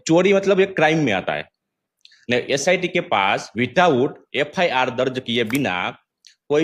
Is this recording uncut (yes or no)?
yes